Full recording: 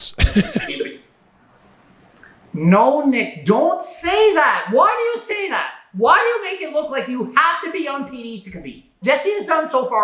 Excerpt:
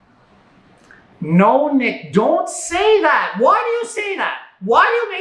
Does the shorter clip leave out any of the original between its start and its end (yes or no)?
no